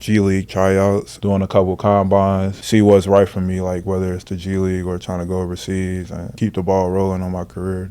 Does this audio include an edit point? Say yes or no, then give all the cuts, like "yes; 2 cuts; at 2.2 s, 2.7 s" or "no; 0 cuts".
yes; 3 cuts; at 1.1 s, 2.6 s, 6.2 s